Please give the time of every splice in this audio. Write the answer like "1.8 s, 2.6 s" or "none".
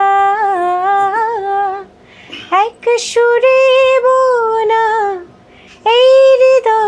none